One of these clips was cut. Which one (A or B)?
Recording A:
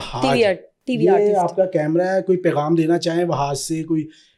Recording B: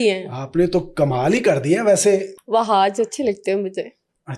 B